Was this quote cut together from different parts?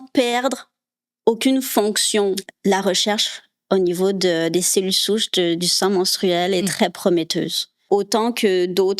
yes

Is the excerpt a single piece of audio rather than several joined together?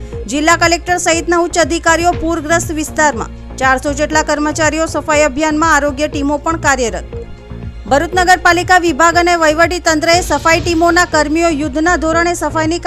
yes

